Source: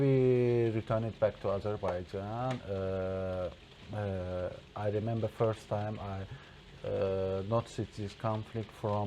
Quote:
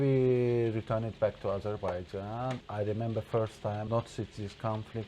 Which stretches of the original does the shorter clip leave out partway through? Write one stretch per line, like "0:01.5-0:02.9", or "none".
0:02.6-0:04.7
0:05.9-0:07.5